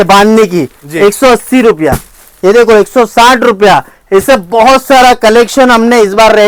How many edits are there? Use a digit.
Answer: 0